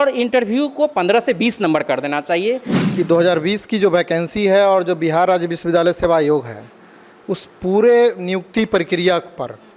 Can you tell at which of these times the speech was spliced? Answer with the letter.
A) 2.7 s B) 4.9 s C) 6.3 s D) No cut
A